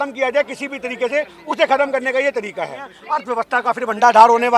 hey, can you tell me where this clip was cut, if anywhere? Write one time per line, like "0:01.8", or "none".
0:02.9